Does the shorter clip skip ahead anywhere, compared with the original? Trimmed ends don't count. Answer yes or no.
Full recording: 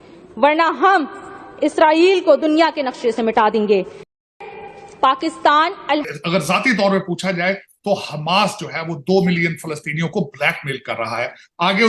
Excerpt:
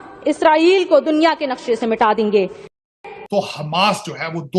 yes